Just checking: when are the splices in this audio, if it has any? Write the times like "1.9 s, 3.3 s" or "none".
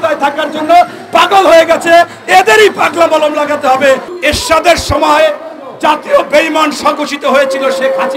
4.1 s